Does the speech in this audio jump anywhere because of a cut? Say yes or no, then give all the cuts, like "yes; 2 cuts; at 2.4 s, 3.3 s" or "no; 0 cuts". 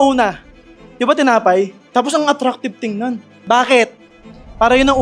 yes; 2 cuts; at 1.8 s, 3.4 s